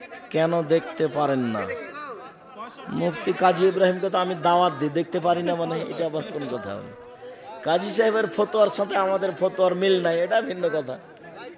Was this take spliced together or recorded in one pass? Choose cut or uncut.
uncut